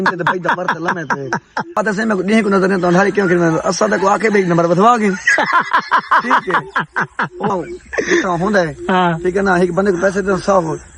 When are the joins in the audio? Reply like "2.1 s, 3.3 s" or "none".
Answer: 1.8 s, 7.5 s